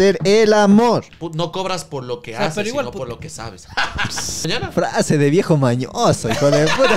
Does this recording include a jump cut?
yes; 2 cuts; at 1.2 s, 4.5 s

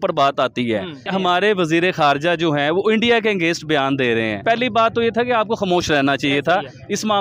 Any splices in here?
yes; 2 cuts; at 1.1 s, 4.4 s

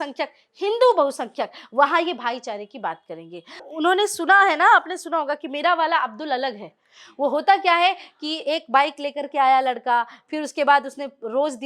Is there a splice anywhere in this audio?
yes; 1 cut; at 3.6 s

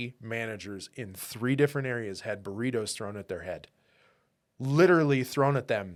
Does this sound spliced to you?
no; 0 cuts

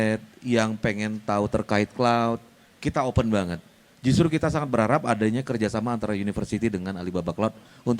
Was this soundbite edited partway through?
no; 0 cuts

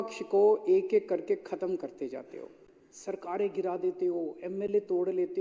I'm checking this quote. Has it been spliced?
no; 0 cuts

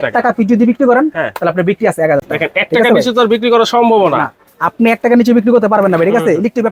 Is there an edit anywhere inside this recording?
no; 0 cuts

